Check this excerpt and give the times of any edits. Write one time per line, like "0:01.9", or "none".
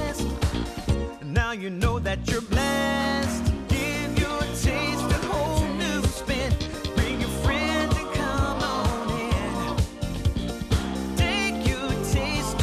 none